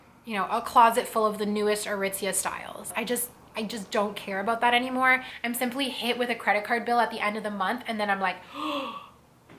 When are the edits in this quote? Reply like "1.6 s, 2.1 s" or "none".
2.9 s, 5.3 s